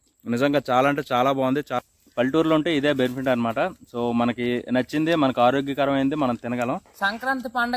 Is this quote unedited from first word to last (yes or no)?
no